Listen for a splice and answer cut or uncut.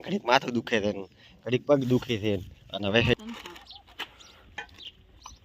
cut